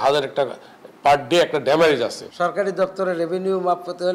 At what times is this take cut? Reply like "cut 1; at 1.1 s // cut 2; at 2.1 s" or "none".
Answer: cut 1; at 2.2 s